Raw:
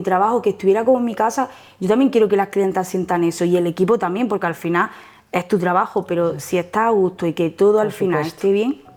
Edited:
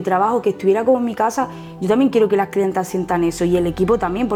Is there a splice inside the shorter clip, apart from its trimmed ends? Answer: no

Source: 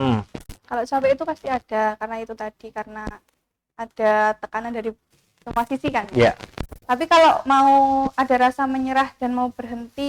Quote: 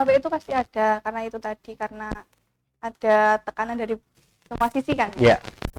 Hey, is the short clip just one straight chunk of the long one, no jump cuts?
yes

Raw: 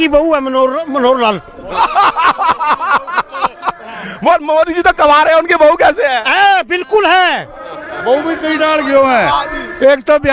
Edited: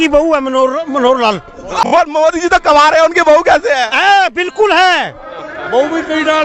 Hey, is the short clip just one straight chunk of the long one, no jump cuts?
no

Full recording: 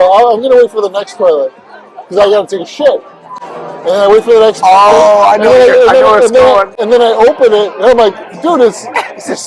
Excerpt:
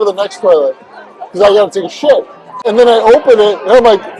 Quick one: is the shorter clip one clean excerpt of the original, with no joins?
no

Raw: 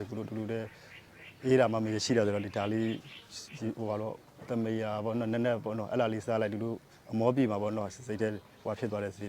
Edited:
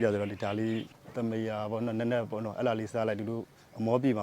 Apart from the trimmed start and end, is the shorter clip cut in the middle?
yes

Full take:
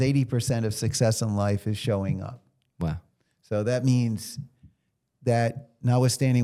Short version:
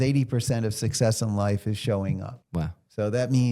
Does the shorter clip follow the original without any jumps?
no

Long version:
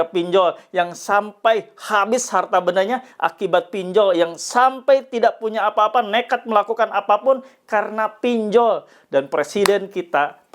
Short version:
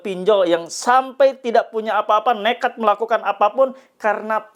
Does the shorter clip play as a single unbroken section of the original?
yes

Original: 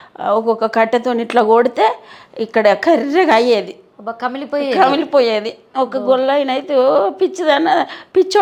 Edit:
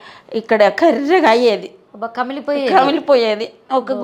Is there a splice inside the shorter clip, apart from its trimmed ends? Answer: no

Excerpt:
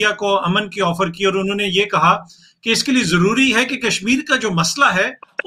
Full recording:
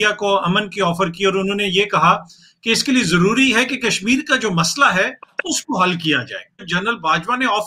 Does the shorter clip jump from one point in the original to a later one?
no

